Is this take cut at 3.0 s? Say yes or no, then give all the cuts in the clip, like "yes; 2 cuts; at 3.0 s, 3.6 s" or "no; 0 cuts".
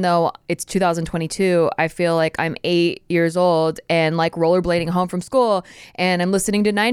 no; 0 cuts